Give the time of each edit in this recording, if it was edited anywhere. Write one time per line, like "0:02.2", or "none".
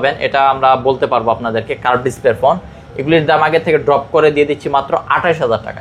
none